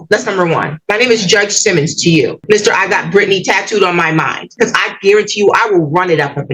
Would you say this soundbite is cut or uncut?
cut